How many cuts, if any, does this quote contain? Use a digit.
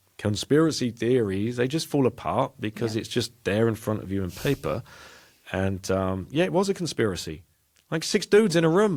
0